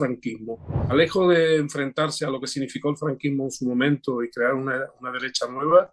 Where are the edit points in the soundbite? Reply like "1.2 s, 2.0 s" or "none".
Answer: 0.9 s